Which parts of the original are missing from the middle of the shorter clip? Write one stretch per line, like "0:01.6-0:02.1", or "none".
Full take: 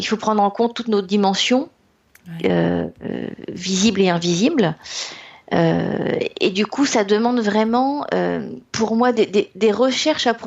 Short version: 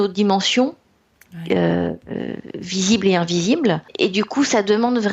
0:04.8-0:06.3